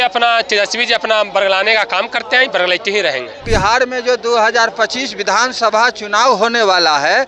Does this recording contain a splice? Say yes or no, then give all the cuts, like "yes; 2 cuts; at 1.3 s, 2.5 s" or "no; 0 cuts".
yes; 1 cut; at 3.5 s